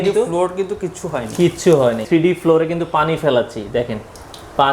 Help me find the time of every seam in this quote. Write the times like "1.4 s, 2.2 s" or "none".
2.0 s